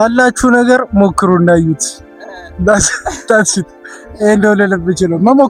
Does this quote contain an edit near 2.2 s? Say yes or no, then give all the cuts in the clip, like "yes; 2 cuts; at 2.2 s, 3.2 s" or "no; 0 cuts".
no; 0 cuts